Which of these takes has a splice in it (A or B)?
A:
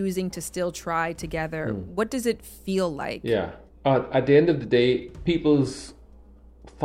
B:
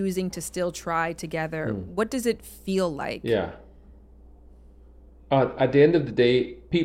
A